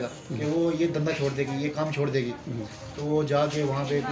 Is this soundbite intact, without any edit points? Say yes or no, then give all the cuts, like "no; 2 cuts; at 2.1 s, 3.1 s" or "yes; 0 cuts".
yes; 0 cuts